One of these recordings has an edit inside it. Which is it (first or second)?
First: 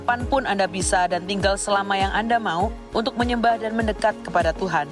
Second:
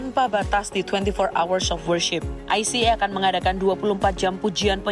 second